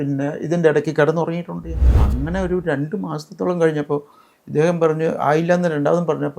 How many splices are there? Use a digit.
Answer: 1